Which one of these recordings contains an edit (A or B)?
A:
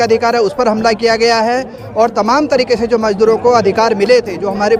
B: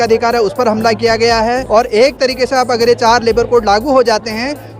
B